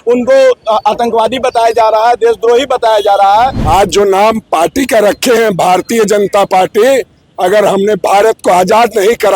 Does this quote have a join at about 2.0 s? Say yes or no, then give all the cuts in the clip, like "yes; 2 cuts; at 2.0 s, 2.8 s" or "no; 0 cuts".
no; 1 cut; at 3.6 s